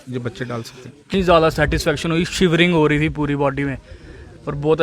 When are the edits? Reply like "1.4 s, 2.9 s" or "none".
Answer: 1.1 s